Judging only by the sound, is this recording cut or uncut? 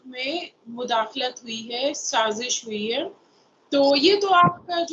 uncut